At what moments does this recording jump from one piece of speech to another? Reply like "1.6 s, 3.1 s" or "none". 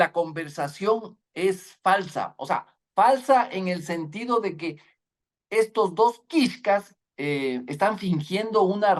none